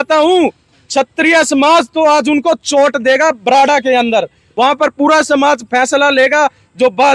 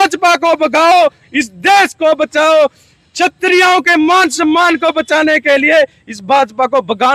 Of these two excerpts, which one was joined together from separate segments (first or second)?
first